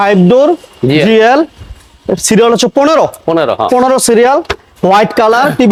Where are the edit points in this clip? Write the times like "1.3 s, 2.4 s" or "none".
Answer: none